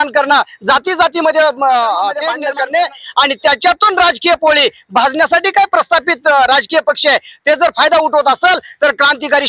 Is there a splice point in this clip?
yes; 1 cut; at 2.3 s

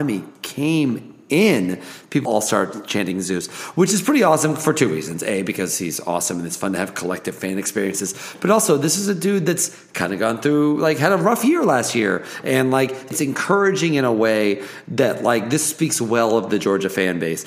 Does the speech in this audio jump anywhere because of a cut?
yes; 2 cuts; at 2.2 s, 13.1 s

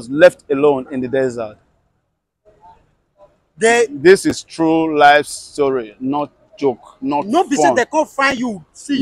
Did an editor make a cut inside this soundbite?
no; 0 cuts

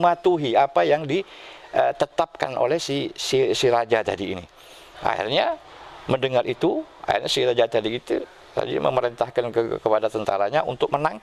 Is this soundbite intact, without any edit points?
yes; 0 cuts

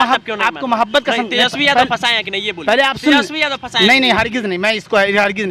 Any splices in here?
no; 0 cuts

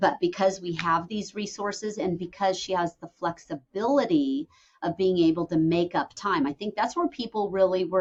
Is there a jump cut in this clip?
no; 0 cuts

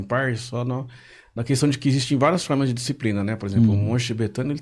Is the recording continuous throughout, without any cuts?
yes; 0 cuts

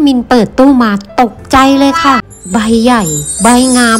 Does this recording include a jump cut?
yes; 1 cut; at 2.3 s

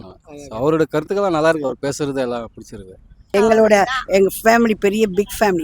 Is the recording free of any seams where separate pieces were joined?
no; 1 cut; at 3.3 s

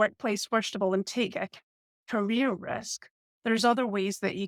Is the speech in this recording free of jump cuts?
yes; 0 cuts

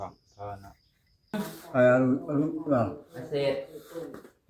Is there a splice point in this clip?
yes; 1 cut; at 1.3 s

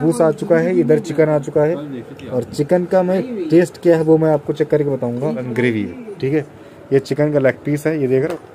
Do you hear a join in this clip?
yes; 1 cut; at 5.5 s

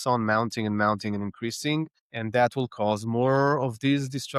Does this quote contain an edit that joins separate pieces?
no; 0 cuts

